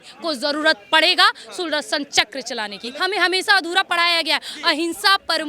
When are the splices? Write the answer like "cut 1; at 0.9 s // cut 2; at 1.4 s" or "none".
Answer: cut 1; at 2.8 s

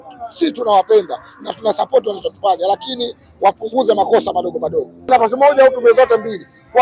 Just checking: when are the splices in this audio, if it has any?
cut 1; at 5.1 s

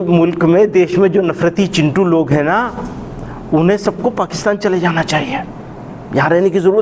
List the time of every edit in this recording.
none

